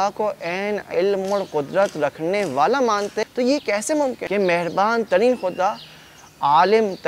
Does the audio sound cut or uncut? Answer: cut